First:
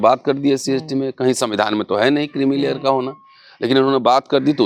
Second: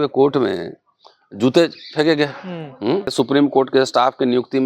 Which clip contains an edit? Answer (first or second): second